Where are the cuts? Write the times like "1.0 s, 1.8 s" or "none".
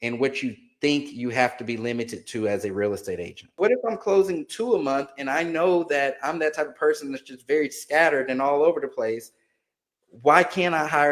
3.6 s